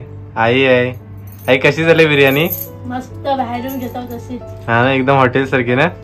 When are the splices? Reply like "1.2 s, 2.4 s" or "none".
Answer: none